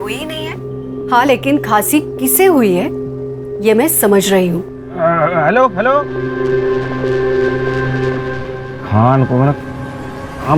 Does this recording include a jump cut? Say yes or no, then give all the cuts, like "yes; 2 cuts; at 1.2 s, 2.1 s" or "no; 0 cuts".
no; 0 cuts